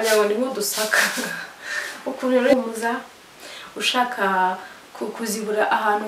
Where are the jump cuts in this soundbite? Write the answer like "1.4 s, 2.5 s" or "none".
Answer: 2.5 s